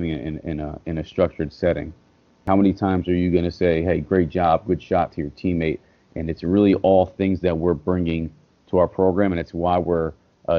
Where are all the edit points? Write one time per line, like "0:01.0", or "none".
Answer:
0:02.4